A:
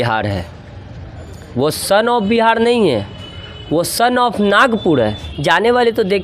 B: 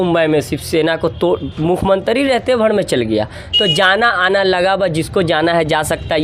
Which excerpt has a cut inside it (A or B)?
A